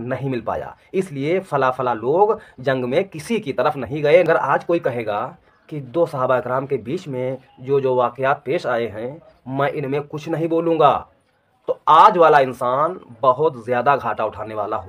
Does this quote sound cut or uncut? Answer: cut